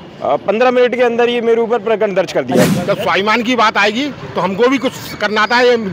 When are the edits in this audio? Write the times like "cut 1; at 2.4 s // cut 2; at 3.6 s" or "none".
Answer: cut 1; at 2.7 s